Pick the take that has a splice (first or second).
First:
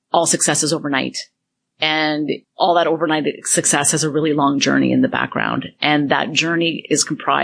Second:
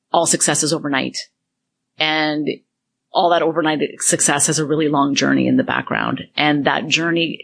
first